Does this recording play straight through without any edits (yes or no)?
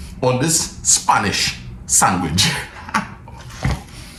yes